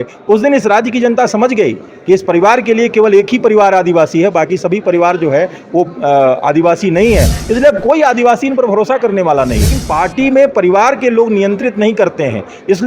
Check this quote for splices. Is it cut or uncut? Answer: cut